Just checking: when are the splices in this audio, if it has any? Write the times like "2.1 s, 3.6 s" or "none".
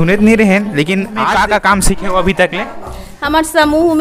1.2 s